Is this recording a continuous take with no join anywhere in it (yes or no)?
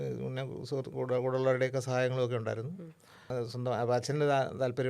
no